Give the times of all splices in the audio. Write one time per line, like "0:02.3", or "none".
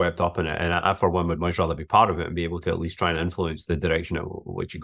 none